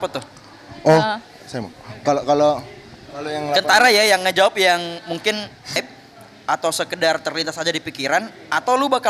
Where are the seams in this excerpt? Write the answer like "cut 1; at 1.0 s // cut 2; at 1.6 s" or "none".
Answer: cut 1; at 5.8 s